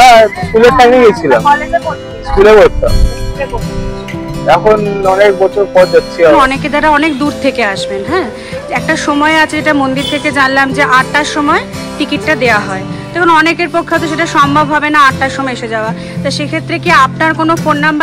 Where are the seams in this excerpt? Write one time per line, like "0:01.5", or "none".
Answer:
0:06.4